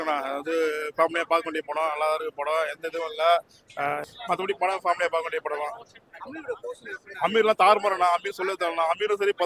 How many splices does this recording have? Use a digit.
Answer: 1